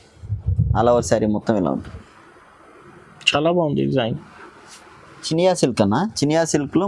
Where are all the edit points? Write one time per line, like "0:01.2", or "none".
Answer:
0:05.3